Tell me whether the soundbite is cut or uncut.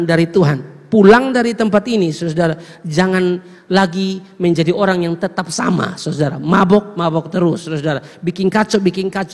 uncut